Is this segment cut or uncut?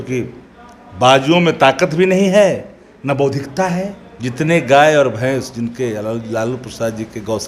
cut